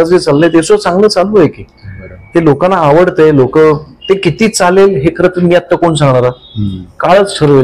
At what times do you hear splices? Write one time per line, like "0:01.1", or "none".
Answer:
none